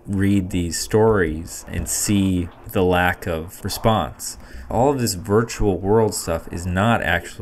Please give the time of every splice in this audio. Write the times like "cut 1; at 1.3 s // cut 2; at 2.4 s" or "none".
cut 1; at 1.8 s // cut 2; at 2.6 s // cut 3; at 3.5 s // cut 4; at 4.5 s